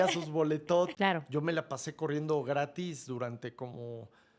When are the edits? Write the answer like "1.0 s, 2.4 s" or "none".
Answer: 0.9 s